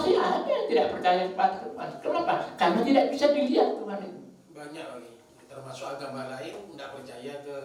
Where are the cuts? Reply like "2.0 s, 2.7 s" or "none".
none